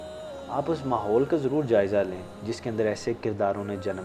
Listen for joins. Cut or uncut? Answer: uncut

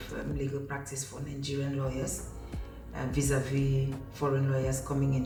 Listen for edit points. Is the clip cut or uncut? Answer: uncut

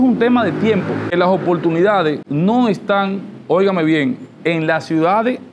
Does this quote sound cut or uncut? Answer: cut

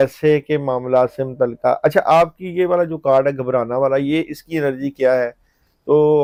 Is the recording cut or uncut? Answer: uncut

